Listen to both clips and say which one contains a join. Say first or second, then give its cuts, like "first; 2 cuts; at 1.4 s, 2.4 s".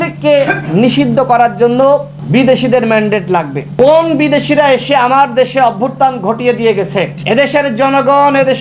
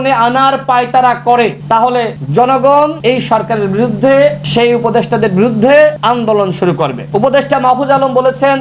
second; 5 cuts; at 1.7 s, 3.0 s, 4.4 s, 6.0 s, 7.0 s